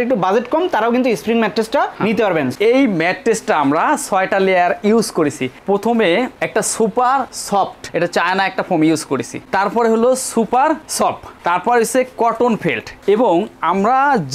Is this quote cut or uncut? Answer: cut